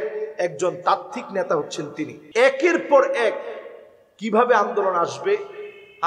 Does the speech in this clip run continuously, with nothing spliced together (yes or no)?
no